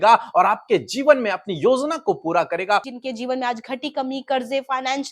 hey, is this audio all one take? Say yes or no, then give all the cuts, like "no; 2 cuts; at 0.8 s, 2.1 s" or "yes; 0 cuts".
no; 1 cut; at 2.9 s